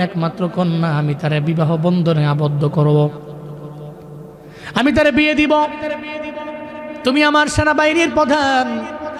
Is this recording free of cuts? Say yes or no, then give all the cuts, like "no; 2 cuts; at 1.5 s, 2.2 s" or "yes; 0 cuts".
yes; 0 cuts